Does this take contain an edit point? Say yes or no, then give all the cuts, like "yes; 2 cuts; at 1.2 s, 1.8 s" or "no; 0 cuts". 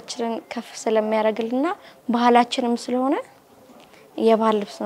no; 0 cuts